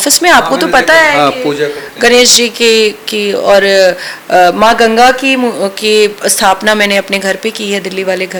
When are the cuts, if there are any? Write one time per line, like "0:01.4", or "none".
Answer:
none